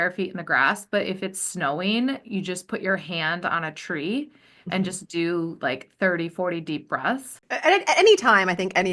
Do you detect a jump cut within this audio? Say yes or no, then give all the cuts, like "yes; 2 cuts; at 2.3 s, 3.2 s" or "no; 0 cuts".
yes; 1 cut; at 7.4 s